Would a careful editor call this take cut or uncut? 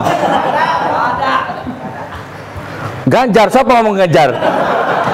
uncut